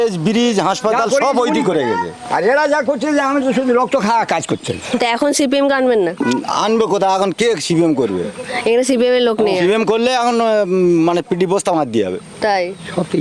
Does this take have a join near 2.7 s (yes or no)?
no